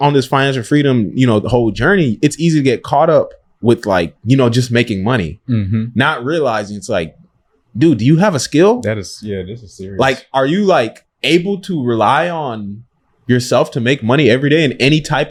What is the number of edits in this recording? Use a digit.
0